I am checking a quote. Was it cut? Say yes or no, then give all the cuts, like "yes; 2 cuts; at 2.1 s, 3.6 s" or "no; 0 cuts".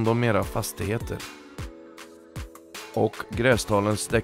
yes; 1 cut; at 2.9 s